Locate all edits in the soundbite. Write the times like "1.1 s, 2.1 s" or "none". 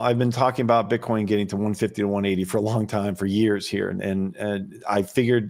none

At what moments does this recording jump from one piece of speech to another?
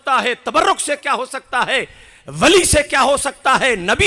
none

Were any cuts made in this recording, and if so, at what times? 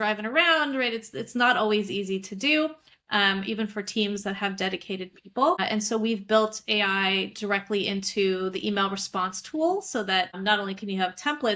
5.6 s, 10.3 s

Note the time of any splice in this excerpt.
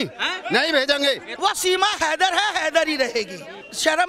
1.3 s

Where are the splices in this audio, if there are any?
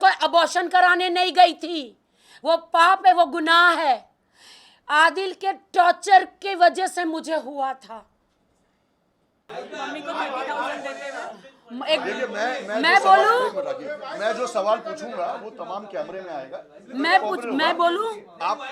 9.5 s

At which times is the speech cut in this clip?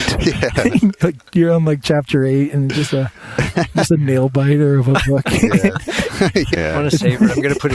6.5 s

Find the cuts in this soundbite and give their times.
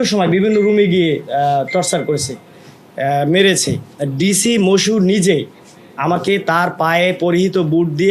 none

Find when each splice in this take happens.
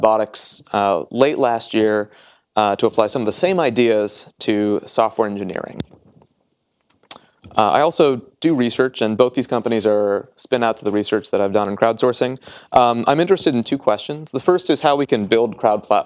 9.3 s

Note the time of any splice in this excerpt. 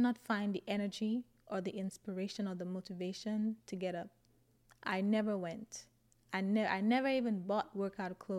none

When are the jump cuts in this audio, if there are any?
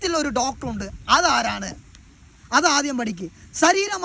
none

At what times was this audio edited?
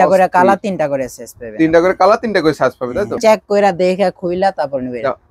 3.2 s

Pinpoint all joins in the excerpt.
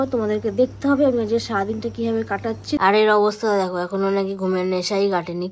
2.8 s

